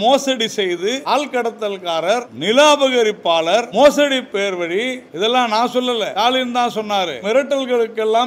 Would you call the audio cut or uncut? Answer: cut